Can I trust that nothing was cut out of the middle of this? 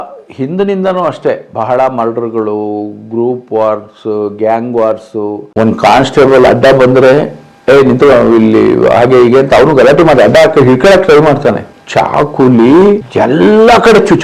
no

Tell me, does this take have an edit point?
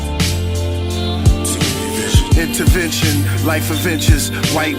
no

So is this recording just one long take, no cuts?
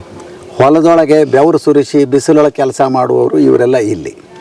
yes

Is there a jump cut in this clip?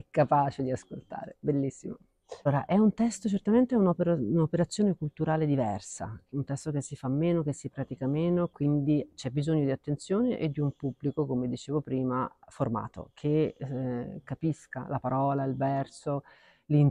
yes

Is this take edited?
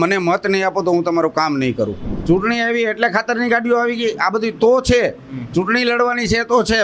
yes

